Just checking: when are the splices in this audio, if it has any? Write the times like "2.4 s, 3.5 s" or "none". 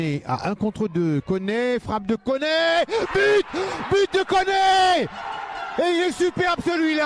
none